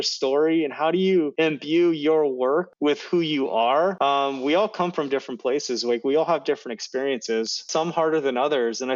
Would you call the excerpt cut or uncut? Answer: cut